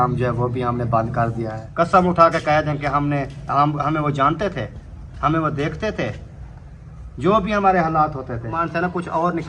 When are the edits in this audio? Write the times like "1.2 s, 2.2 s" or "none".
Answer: 1.6 s, 8.6 s

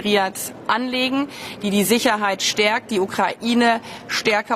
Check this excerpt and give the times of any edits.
1.4 s

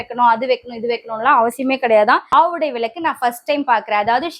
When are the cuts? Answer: 2.3 s

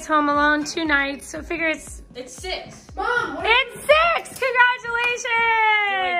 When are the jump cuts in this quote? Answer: none

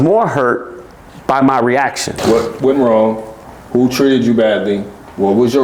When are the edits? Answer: 2.1 s

